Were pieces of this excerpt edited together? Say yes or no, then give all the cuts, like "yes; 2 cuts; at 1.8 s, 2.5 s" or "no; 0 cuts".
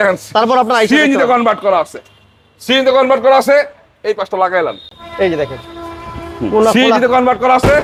no; 0 cuts